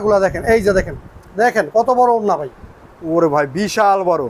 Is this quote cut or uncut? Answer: uncut